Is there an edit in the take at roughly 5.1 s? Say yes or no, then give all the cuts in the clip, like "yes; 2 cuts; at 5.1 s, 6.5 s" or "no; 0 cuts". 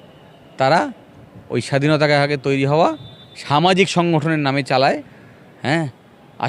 no; 0 cuts